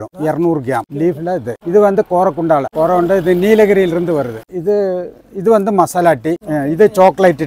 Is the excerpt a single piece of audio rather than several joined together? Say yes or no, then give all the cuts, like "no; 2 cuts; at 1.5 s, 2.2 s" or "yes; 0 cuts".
no; 2 cuts; at 0.9 s, 4.4 s